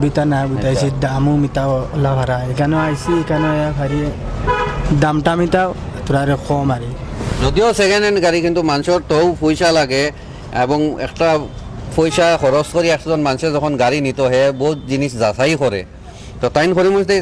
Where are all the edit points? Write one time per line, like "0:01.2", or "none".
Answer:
none